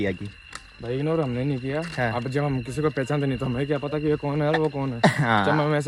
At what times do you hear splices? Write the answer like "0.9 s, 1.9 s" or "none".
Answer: none